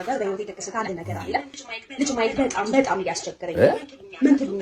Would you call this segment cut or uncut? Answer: cut